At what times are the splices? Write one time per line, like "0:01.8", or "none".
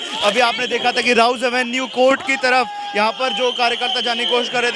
none